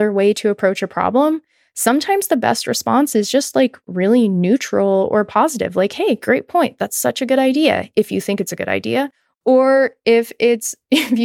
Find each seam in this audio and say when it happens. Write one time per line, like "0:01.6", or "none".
0:09.2